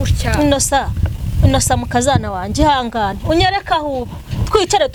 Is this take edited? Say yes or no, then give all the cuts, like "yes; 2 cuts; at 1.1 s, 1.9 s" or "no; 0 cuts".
no; 0 cuts